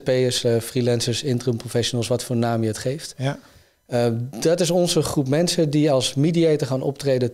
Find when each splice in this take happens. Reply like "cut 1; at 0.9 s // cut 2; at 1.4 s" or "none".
none

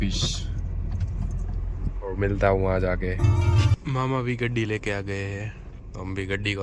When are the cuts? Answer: cut 1; at 3.7 s

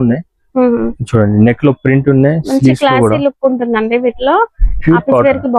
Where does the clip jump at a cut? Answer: none

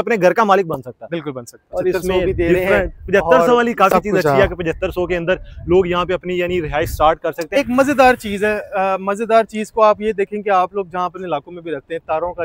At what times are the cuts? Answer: cut 1; at 1.6 s // cut 2; at 7.4 s

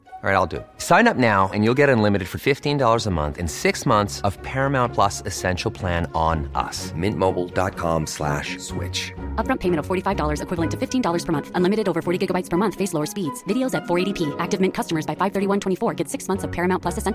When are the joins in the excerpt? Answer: none

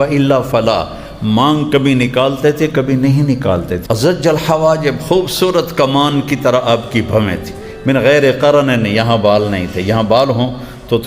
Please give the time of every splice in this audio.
cut 1; at 3.4 s

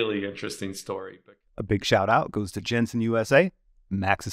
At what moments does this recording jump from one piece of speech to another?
cut 1; at 1.2 s

